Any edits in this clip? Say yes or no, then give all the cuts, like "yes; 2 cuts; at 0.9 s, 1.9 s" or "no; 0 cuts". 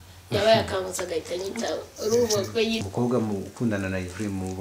yes; 1 cut; at 2.8 s